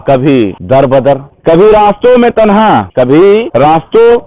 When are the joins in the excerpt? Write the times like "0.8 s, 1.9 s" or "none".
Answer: 0.8 s, 3.1 s